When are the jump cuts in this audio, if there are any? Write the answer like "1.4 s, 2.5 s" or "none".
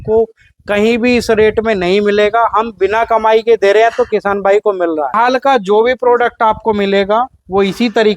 5.1 s